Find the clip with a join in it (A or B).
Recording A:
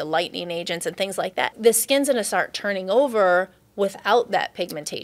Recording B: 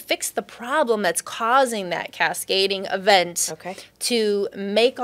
A